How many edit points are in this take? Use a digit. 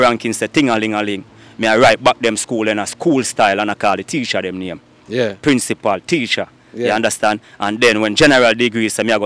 0